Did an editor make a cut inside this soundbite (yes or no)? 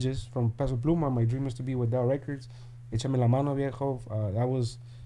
no